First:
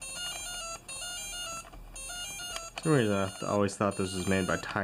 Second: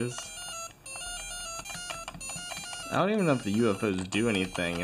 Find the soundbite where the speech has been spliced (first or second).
second